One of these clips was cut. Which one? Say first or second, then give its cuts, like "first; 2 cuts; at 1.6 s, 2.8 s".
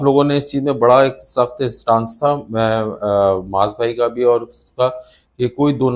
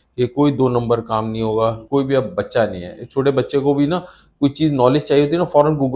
second; 1 cut; at 1.8 s